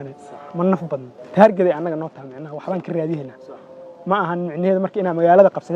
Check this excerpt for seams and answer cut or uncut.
cut